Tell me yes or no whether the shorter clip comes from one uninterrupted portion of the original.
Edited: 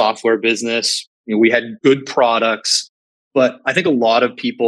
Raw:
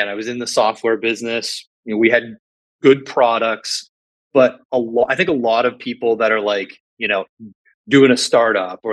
no